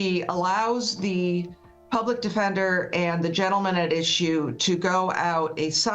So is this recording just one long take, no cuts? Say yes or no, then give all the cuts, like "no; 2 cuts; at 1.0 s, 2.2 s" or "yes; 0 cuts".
yes; 0 cuts